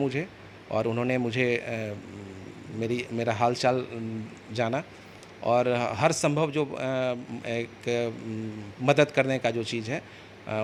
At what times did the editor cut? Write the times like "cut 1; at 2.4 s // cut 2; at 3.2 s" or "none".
none